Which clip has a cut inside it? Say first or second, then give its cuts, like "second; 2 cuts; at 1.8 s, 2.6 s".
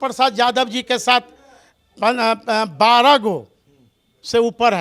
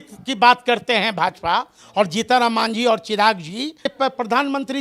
second; 1 cut; at 3.9 s